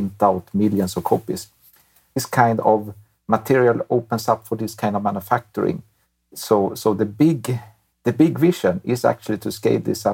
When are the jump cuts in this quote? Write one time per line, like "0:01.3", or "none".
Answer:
0:02.2
0:06.2